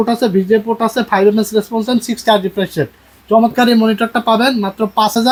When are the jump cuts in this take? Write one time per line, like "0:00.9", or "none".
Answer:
none